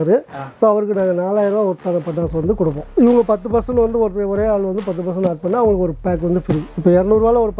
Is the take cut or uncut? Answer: cut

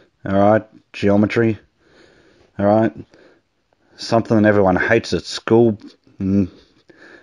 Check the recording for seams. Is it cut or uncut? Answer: cut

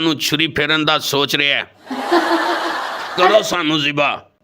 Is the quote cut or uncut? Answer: cut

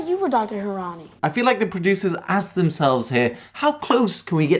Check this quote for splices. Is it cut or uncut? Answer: cut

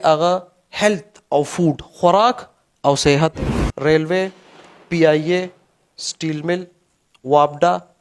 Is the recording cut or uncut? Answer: cut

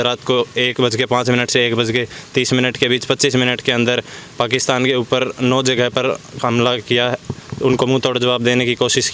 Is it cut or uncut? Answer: uncut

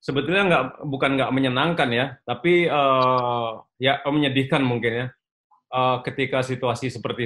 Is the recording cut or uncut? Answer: uncut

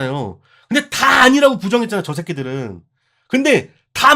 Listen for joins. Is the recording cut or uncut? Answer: uncut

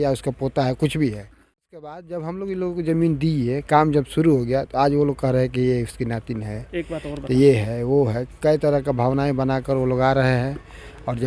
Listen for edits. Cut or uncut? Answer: cut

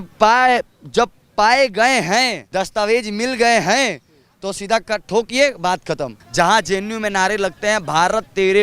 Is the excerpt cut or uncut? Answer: cut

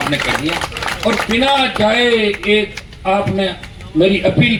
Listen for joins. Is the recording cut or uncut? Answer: uncut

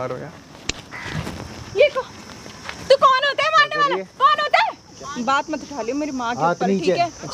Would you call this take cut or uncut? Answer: cut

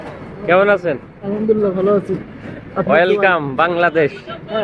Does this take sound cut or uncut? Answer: uncut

